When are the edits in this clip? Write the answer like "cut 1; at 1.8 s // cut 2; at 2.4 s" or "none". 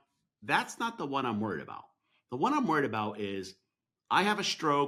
none